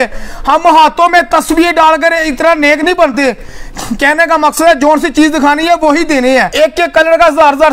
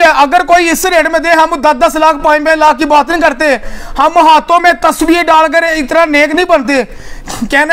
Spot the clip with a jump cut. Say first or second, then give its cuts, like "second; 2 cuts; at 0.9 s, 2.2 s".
first; 1 cut; at 6.5 s